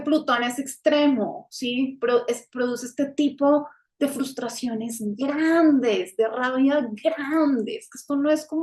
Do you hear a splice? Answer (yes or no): no